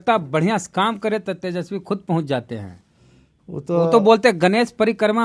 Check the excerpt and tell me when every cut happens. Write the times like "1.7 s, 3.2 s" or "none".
none